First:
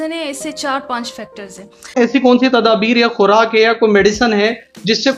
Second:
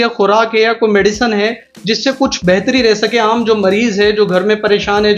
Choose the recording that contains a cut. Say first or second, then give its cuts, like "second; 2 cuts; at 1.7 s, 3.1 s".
first; 1 cut; at 2.0 s